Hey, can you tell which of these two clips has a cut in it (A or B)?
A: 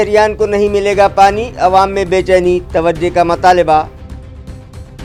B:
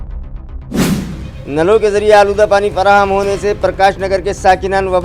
B